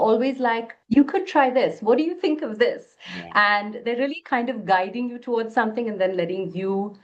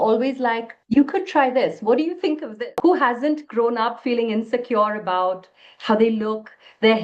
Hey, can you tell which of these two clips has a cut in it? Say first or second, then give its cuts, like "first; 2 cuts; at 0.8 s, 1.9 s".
second; 1 cut; at 2.5 s